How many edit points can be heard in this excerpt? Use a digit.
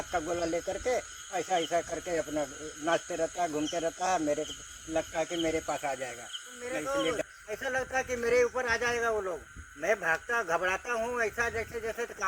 1